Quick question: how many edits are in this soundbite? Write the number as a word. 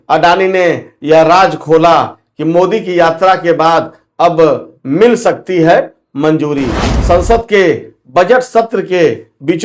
zero